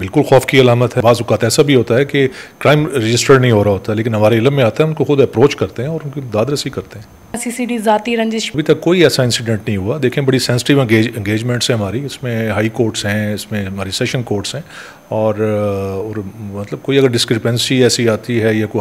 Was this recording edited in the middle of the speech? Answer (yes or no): yes